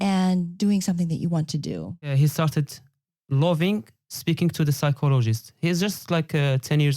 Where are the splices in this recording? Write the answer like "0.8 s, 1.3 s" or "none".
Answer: 2.1 s